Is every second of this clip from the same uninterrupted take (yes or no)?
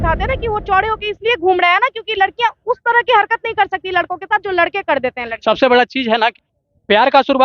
no